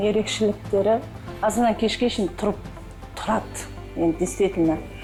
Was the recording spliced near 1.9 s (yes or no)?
no